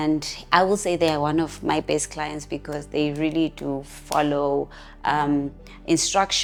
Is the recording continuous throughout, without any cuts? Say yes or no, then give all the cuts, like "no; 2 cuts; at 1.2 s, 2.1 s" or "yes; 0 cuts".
yes; 0 cuts